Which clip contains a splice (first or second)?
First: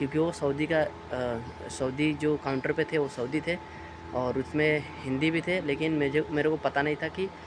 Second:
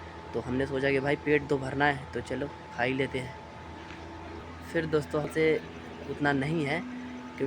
second